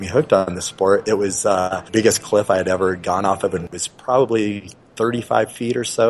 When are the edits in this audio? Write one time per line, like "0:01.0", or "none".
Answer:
0:01.8
0:03.7